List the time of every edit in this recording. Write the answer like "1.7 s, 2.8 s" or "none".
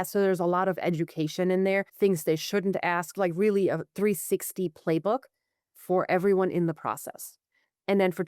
1.9 s